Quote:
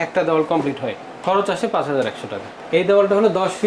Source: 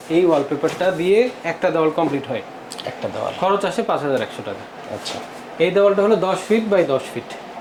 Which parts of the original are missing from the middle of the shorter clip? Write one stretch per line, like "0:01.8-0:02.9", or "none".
0:02.6-0:03.3
0:04.6-0:05.4